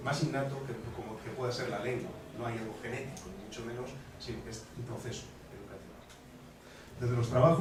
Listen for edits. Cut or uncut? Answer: uncut